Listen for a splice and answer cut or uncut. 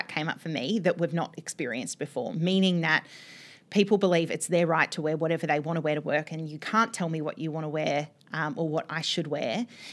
uncut